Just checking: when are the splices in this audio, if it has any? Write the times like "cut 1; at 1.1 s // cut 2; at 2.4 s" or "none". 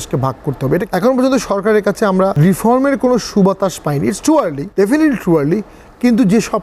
cut 1; at 0.8 s // cut 2; at 2.3 s // cut 3; at 4.6 s